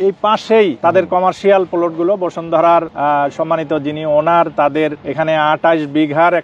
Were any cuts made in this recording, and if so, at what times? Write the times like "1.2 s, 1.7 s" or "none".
2.9 s, 5.0 s